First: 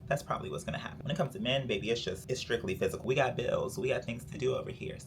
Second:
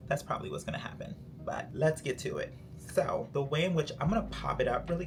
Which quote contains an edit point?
first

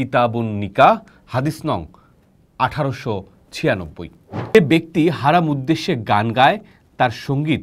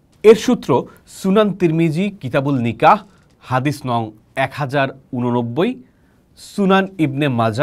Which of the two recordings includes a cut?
first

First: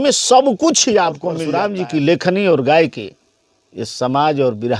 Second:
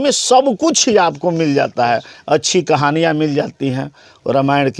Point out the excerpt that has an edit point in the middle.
first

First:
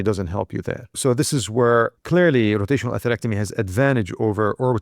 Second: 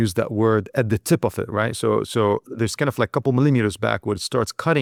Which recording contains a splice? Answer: first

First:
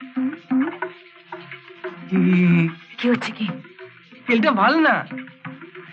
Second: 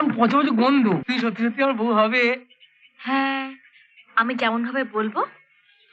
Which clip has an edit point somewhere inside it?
second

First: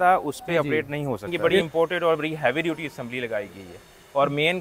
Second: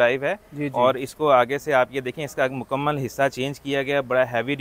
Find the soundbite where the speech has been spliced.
first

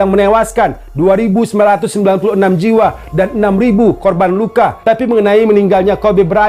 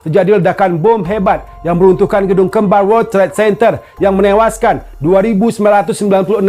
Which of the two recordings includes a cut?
first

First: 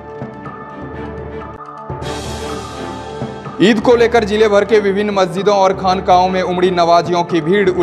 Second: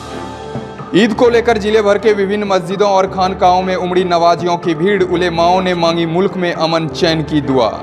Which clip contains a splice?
first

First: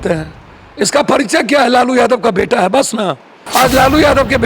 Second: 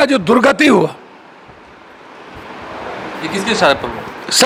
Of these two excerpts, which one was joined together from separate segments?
first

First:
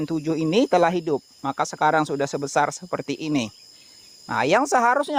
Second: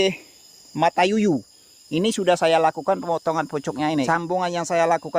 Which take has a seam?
second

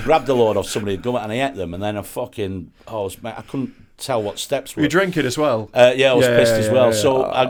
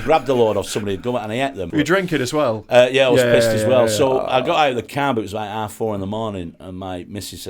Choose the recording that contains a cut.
second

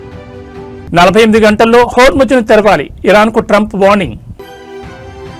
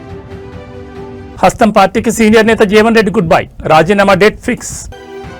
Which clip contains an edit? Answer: second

